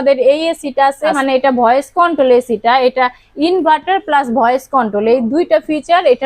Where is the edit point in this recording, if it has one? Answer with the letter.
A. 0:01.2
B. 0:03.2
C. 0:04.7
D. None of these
A